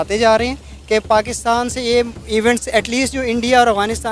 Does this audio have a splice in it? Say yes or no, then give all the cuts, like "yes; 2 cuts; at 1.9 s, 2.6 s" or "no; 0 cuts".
no; 0 cuts